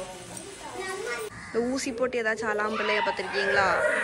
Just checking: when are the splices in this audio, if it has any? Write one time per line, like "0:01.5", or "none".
0:01.3